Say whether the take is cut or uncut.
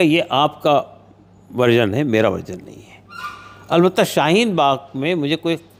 uncut